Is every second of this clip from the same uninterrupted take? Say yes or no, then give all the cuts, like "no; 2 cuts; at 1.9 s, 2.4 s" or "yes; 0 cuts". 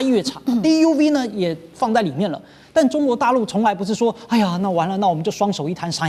yes; 0 cuts